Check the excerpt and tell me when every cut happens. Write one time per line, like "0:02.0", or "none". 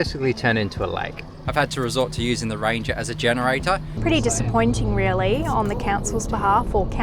0:01.4
0:03.9